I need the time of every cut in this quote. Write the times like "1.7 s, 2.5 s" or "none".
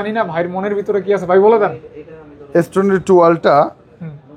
none